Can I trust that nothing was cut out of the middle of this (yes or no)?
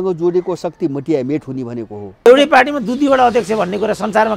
no